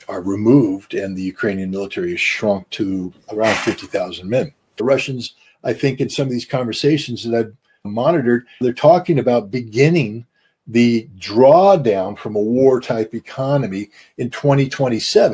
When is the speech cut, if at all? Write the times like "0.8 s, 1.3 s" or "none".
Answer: 4.8 s